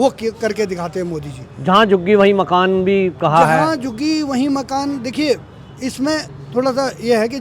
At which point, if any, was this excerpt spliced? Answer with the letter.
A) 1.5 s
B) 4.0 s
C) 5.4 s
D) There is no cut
D